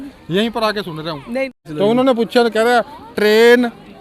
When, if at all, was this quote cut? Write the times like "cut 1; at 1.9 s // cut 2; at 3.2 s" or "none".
cut 1; at 1.6 s